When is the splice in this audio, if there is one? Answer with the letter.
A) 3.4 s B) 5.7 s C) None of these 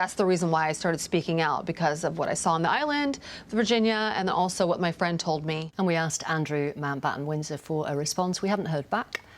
B